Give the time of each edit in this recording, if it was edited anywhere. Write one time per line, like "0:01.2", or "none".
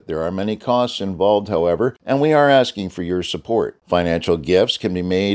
0:02.0